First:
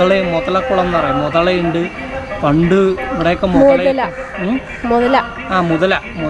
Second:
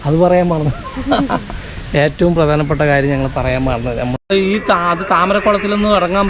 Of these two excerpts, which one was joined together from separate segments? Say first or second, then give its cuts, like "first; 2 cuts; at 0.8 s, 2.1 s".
second; 1 cut; at 4.3 s